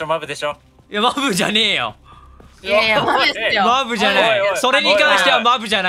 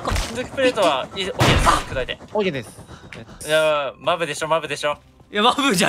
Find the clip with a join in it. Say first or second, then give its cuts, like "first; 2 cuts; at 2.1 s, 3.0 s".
second; 1 cut; at 3.3 s